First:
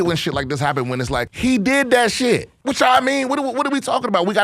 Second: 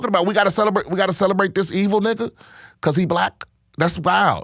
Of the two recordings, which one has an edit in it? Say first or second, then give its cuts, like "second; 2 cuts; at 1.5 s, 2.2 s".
first; 2 cuts; at 1.3 s, 2.5 s